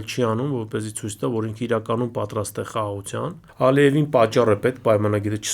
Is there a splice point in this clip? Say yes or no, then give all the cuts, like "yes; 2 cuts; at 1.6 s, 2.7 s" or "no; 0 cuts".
yes; 1 cut; at 3.4 s